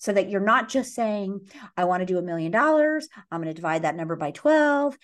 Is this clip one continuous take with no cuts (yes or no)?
yes